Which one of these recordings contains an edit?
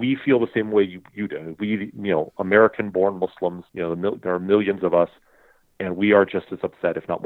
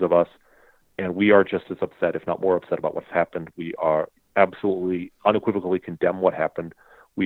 first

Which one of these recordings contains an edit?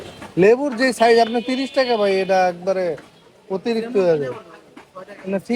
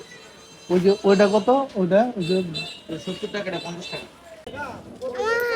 second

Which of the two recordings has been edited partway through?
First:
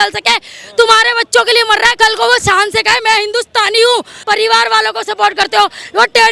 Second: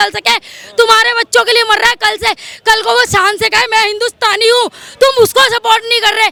first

